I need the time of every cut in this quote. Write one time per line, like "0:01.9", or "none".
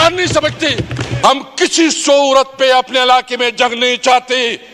0:01.0